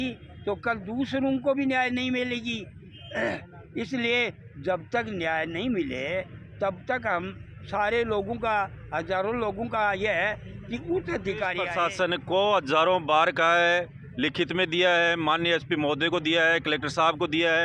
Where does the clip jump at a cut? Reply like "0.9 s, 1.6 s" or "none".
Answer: 11.6 s